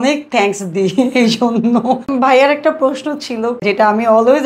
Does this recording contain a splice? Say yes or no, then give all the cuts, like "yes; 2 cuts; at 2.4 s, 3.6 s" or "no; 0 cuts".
yes; 2 cuts; at 2.1 s, 3.6 s